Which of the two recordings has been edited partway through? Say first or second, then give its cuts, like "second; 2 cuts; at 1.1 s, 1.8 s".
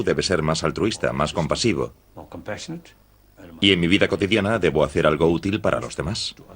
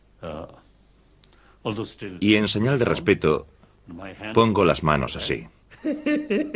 first; 1 cut; at 1.1 s